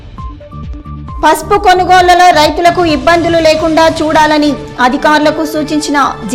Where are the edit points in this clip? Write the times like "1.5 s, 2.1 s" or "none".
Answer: 1.1 s